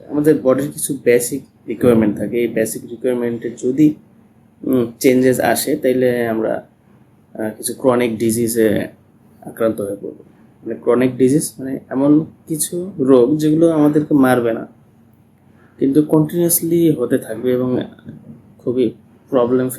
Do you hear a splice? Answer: no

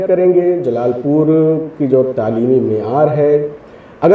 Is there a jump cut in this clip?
no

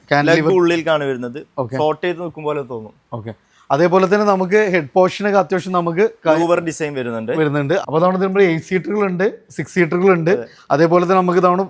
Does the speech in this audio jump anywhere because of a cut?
yes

